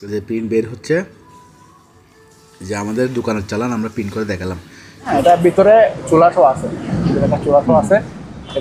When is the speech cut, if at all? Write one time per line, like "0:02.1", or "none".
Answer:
0:05.1